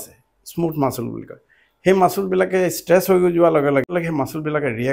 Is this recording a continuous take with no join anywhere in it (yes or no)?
no